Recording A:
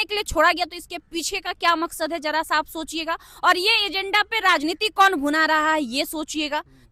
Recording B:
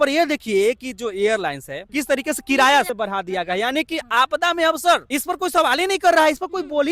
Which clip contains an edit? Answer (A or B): B